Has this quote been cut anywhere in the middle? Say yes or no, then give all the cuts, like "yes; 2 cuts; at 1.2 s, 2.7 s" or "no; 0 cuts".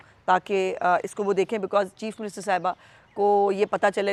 no; 0 cuts